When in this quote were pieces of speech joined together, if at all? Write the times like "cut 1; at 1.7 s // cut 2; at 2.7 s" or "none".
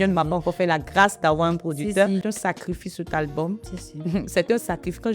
cut 1; at 2.2 s